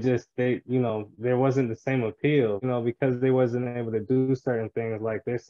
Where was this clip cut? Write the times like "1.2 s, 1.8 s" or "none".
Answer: 2.6 s